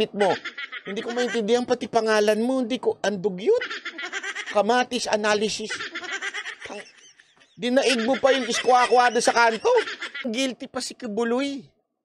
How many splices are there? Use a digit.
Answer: 1